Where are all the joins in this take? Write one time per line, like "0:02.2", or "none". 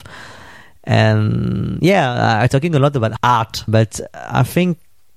0:03.6